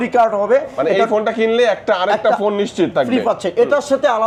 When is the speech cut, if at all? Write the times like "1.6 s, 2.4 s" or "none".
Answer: none